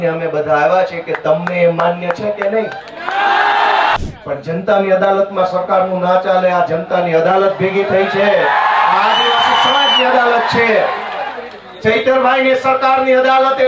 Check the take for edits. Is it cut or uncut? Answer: cut